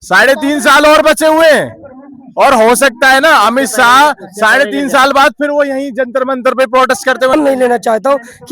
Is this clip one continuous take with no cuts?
no; 1 cut; at 7.3 s

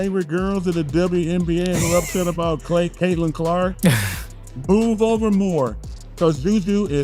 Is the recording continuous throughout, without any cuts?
yes; 0 cuts

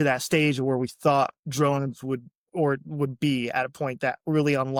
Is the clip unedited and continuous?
yes; 0 cuts

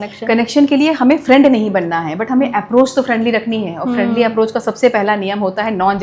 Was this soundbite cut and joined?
no; 0 cuts

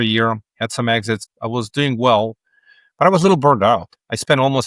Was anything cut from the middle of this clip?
yes; 1 cut; at 1.2 s

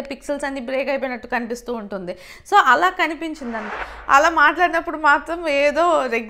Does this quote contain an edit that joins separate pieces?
yes; 1 cut; at 3.7 s

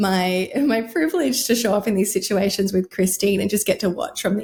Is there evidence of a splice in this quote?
no; 0 cuts

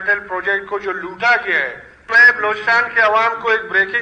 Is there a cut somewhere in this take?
yes; 1 cut; at 2.3 s

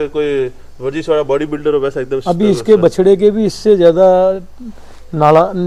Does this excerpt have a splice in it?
no; 0 cuts

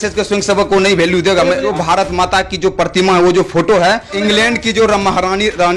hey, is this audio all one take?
no; 2 cuts; at 1.7 s, 4.1 s

